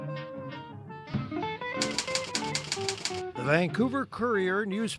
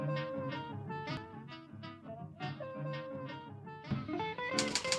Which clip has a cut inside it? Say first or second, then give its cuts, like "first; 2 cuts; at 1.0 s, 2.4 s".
first; 1 cut; at 0.9 s